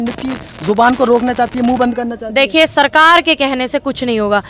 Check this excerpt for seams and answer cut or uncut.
uncut